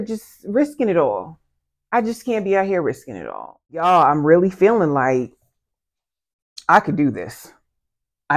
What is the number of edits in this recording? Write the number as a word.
one